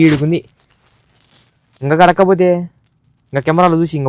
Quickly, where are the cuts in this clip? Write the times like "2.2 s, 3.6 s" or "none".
none